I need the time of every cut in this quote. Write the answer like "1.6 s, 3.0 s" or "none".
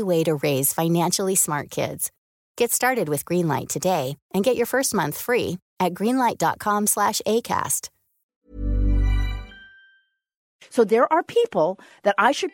10.4 s